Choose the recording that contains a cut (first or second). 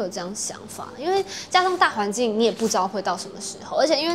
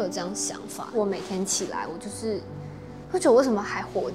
second